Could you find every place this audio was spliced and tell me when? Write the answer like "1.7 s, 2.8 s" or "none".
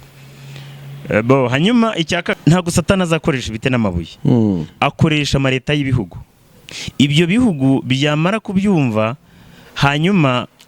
2.4 s